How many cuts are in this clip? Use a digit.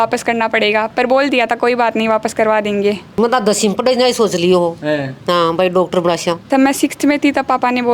2